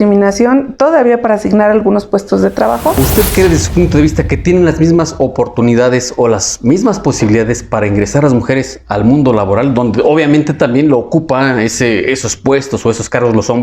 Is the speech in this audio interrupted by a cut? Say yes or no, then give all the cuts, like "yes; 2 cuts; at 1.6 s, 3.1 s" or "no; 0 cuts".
yes; 1 cut; at 3.1 s